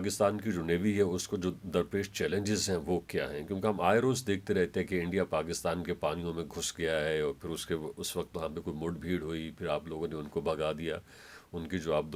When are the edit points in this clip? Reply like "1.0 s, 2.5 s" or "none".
none

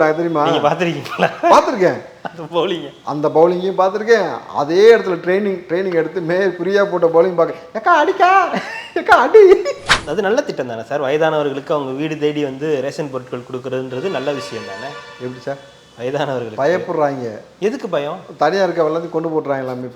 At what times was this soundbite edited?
9.9 s

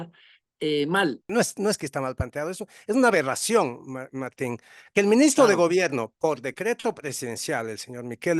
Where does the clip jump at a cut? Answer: 1.3 s

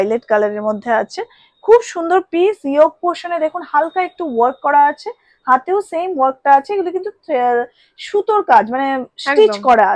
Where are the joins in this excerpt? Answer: none

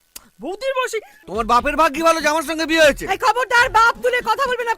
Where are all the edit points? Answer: 1.2 s

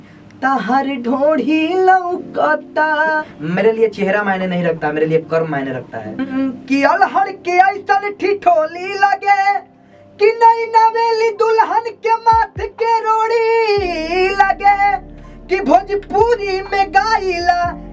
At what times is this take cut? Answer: 3.3 s, 6.2 s

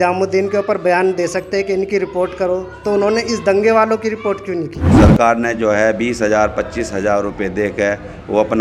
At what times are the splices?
4.9 s

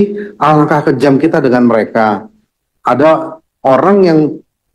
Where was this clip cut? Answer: 2.5 s

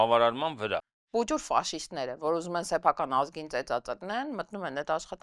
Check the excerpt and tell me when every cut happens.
0.9 s

